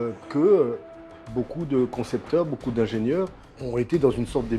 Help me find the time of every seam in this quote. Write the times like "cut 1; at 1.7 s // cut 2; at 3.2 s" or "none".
cut 1; at 3.5 s